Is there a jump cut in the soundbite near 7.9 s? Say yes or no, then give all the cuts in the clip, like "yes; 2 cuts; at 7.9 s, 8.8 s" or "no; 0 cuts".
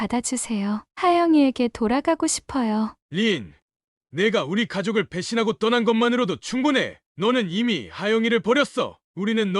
no; 1 cut; at 3.0 s